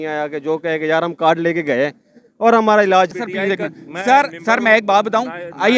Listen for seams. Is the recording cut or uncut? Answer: cut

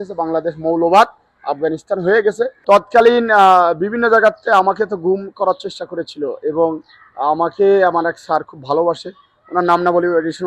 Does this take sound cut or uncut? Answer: uncut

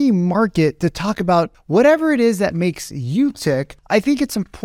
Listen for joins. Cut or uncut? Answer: cut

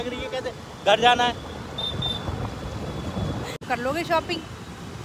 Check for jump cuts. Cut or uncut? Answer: cut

